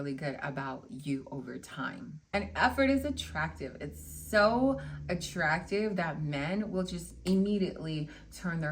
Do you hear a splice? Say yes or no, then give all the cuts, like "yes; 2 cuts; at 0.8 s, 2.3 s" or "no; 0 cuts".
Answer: yes; 1 cut; at 2.1 s